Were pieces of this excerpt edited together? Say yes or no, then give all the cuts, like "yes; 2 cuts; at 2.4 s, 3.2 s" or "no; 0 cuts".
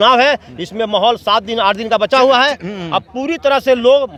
no; 0 cuts